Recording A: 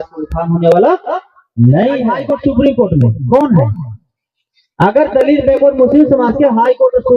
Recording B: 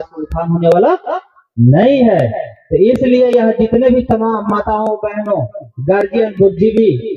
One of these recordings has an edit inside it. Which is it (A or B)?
A